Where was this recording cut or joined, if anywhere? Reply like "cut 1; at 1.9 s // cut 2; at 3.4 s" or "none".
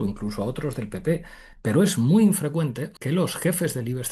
cut 1; at 2.9 s